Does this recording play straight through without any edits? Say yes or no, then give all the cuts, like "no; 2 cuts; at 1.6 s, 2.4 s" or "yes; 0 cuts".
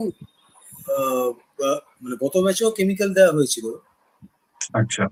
yes; 0 cuts